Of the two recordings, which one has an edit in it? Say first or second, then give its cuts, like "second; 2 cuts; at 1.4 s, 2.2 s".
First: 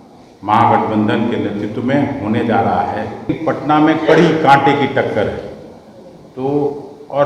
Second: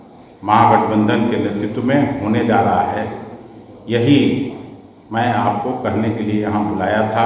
first; 1 cut; at 3.3 s